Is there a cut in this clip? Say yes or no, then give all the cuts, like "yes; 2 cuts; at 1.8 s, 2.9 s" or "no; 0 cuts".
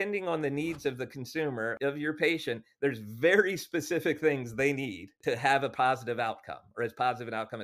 yes; 2 cuts; at 1.7 s, 5.2 s